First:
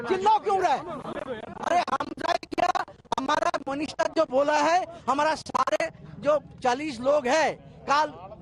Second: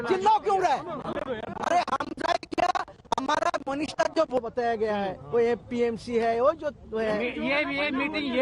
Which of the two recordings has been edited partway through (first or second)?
second